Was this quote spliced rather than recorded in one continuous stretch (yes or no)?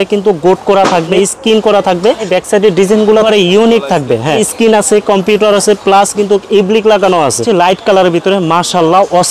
yes